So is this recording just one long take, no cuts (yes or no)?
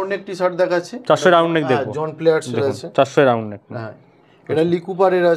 yes